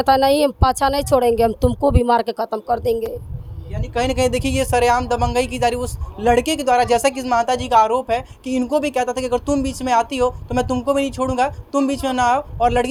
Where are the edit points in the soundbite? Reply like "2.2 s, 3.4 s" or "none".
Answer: none

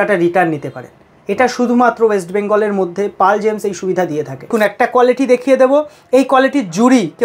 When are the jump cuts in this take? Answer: 4.5 s

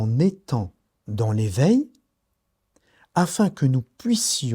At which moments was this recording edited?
none

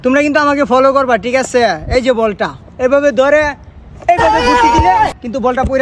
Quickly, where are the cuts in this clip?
none

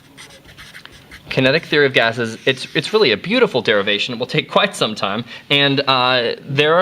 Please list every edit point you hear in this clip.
3.1 s

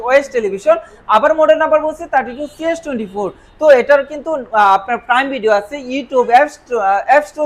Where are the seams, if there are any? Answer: none

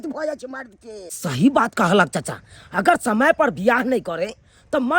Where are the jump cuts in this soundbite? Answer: 1.1 s

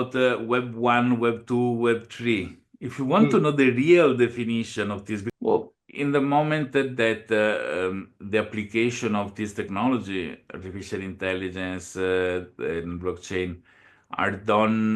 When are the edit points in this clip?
5.1 s

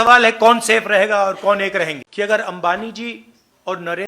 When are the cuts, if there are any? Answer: 2.0 s

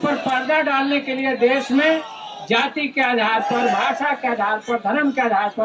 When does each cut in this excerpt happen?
none

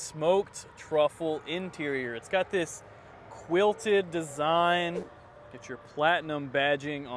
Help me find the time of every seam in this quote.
5.2 s

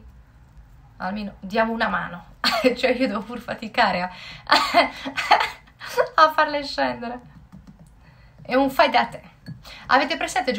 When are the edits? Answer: none

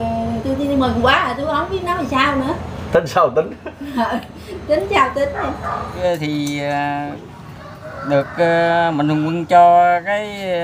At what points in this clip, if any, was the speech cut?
6.0 s

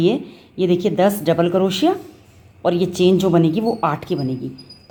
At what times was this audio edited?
none

